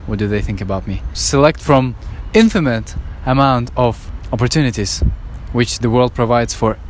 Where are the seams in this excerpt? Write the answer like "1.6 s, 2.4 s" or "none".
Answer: none